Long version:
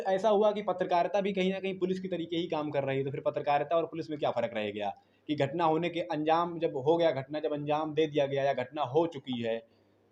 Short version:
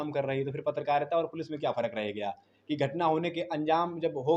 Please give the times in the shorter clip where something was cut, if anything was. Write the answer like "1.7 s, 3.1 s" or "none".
none